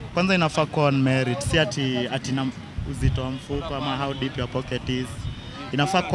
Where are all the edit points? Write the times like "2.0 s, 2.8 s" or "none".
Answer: none